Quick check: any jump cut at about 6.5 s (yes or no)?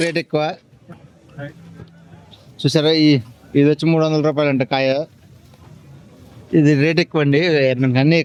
no